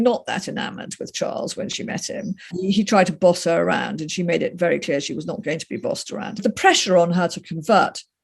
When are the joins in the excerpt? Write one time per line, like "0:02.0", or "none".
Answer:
0:02.5
0:06.4